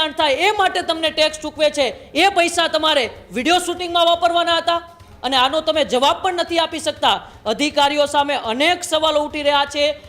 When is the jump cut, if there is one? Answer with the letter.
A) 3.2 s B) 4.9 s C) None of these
C